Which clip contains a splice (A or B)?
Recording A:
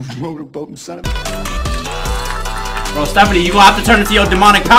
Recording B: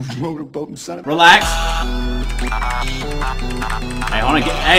A